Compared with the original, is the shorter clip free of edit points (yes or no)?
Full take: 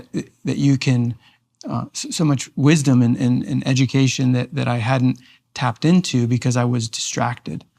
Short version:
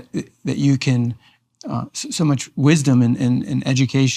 yes